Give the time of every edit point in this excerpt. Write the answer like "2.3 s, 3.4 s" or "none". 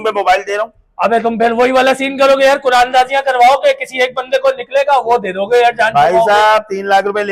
none